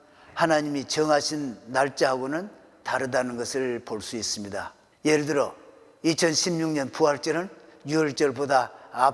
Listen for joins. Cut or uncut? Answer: cut